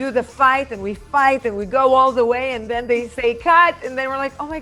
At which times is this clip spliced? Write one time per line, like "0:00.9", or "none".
none